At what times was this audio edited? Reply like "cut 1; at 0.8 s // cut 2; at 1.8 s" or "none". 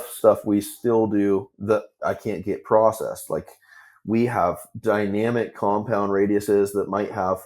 cut 1; at 1.5 s